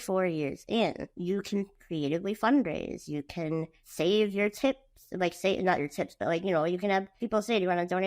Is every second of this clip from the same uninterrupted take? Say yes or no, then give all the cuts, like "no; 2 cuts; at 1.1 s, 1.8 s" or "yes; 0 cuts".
no; 3 cuts; at 1.1 s, 3.8 s, 7.2 s